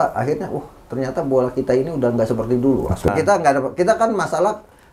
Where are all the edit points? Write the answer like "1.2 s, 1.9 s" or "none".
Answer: 3.1 s